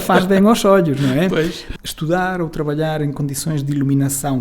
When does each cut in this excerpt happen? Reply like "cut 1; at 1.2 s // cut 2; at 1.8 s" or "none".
cut 1; at 1.6 s

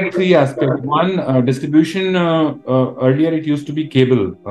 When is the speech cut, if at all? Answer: none

